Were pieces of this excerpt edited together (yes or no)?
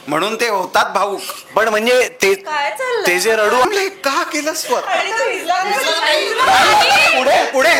yes